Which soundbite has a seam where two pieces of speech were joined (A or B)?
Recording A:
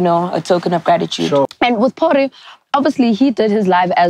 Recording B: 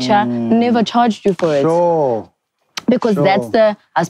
A